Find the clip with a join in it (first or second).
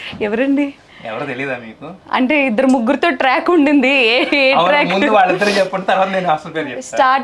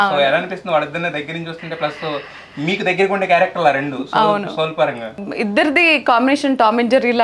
second